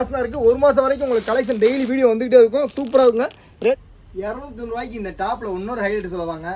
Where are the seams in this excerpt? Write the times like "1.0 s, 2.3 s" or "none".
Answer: 3.7 s